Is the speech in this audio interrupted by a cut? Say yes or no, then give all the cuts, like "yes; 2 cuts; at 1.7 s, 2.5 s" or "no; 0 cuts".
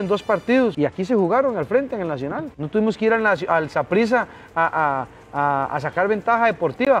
yes; 2 cuts; at 0.7 s, 2.5 s